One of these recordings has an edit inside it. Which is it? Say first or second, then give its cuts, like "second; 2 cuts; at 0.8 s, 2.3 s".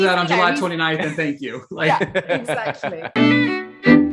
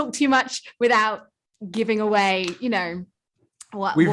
first; 1 cut; at 3.0 s